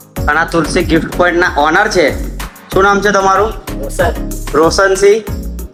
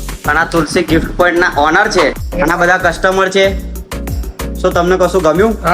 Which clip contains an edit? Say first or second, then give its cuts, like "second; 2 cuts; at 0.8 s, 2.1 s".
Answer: second; 1 cut; at 2.2 s